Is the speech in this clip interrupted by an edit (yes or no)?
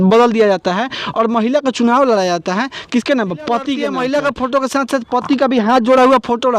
yes